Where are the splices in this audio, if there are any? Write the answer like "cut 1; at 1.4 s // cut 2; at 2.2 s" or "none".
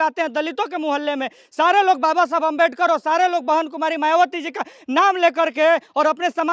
none